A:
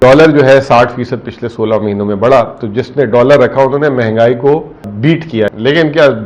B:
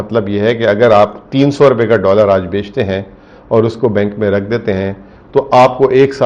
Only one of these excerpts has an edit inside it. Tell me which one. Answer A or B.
A